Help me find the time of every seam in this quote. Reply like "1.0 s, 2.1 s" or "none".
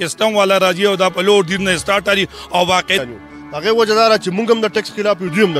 3.0 s